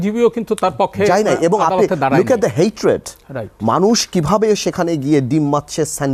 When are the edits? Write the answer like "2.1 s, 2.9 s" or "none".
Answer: none